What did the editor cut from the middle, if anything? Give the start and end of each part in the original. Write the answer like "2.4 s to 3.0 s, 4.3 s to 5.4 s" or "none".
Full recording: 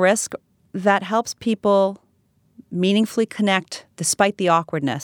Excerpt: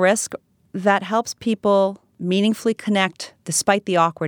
2.1 s to 2.6 s